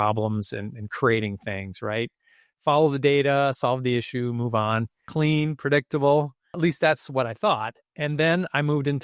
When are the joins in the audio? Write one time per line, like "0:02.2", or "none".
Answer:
0:05.0
0:06.5